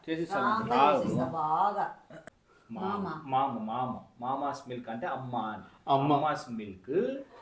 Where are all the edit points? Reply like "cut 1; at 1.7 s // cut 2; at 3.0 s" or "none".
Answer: cut 1; at 2.1 s